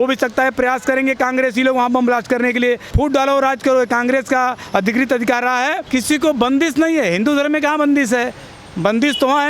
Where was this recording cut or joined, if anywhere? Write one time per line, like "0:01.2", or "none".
0:02.9
0:05.8